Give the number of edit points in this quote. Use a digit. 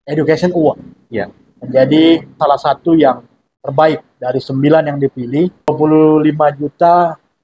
2